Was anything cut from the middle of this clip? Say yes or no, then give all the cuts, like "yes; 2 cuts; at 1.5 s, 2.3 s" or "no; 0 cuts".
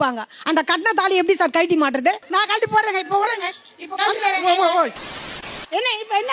yes; 2 cuts; at 2.2 s, 5.4 s